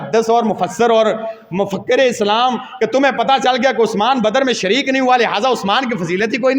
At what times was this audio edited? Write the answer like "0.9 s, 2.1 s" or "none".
none